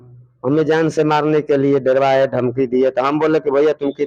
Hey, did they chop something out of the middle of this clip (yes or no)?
no